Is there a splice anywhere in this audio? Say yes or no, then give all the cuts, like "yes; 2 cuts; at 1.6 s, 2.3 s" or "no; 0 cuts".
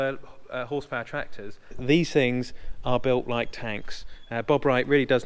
yes; 1 cut; at 1.8 s